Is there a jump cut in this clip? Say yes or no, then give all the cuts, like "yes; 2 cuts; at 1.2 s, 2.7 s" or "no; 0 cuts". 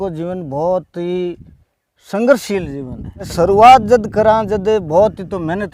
yes; 1 cut; at 3.3 s